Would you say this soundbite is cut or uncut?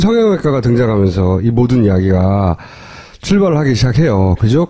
uncut